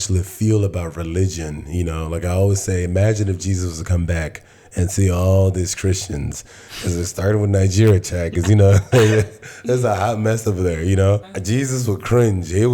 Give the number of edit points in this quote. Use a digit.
1